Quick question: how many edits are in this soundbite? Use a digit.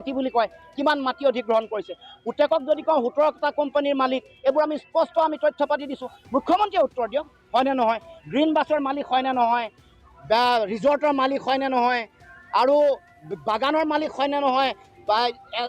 0